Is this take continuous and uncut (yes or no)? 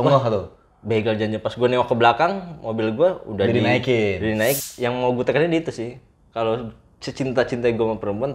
no